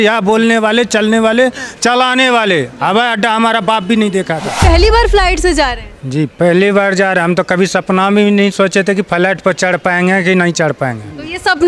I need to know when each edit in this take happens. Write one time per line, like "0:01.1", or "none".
0:04.5